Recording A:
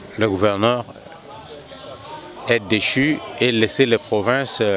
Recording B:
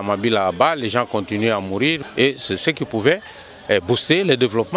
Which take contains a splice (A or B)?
B